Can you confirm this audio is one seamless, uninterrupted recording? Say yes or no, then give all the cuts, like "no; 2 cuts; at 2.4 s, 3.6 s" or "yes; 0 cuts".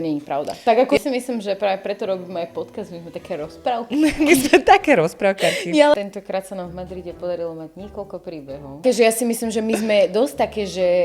no; 3 cuts; at 1.0 s, 5.9 s, 8.8 s